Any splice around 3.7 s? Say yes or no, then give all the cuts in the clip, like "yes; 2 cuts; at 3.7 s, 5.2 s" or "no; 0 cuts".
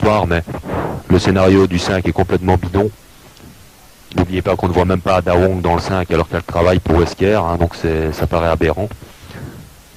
no; 0 cuts